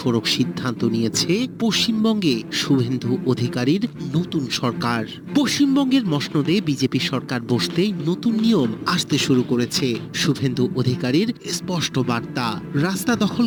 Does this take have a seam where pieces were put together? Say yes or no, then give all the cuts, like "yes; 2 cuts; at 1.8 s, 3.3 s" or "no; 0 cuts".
no; 0 cuts